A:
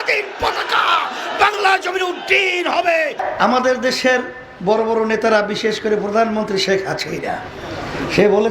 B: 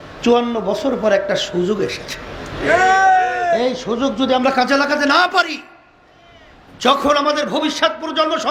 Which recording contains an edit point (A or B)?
A